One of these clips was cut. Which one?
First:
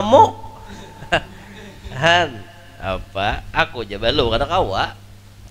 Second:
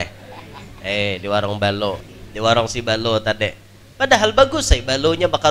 second; 1 cut; at 2.2 s

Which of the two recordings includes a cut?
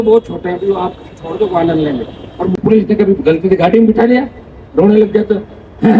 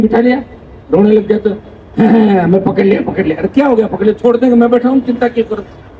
first; 1 cut; at 2.6 s

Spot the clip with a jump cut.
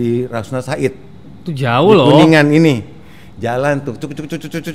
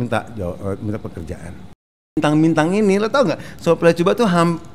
second; 1 cut; at 2.2 s

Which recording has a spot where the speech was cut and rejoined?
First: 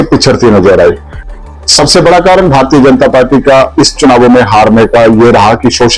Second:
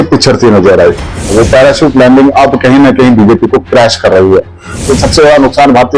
second; 2 cuts; at 1.3 s, 4.9 s

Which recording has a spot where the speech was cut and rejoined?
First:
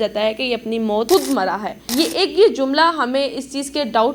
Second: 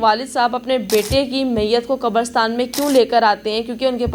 first; 2 cuts; at 1.1 s, 1.8 s

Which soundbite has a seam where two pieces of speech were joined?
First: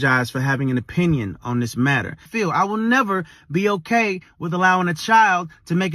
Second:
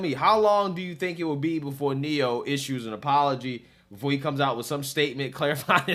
first; 1 cut; at 2.3 s

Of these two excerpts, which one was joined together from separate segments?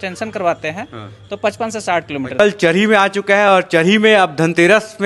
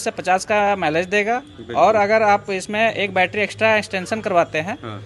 first; 1 cut; at 2.4 s

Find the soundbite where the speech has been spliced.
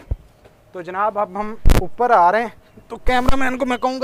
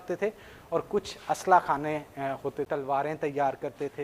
second; 1 cut; at 2.7 s

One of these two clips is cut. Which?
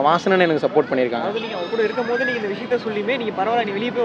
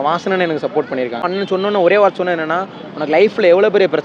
second; 1 cut; at 1.3 s

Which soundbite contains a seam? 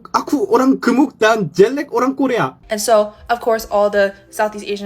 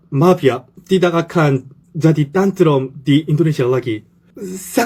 first; 1 cut; at 2.6 s

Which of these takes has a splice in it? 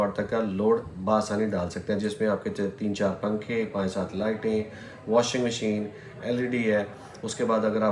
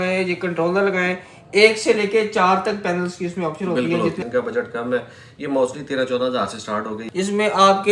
second; 2 cuts; at 4.2 s, 7.0 s

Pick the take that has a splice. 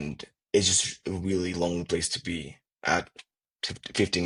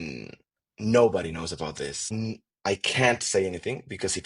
second; 1 cut; at 2.1 s

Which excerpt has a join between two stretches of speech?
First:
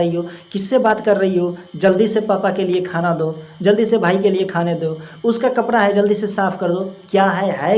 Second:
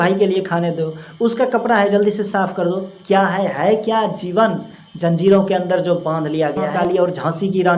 second; 1 cut; at 6.7 s

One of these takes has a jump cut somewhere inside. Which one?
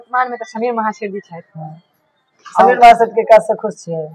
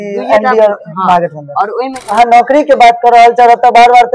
second; 1 cut; at 2.0 s

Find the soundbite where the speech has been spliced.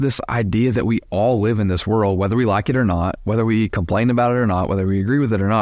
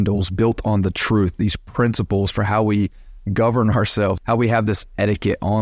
second; 1 cut; at 4.2 s

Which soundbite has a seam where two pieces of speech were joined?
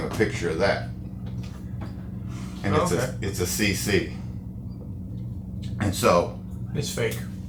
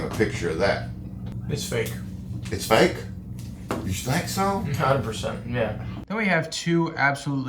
second; 2 cuts; at 1.3 s, 6.0 s

